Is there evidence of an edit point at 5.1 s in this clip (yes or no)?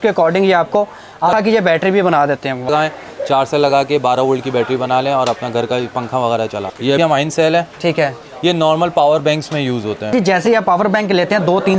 no